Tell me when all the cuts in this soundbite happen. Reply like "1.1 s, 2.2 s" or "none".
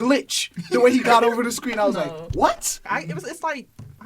2.8 s